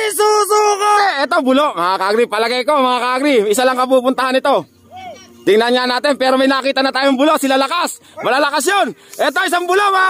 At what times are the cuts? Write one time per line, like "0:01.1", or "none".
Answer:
0:01.0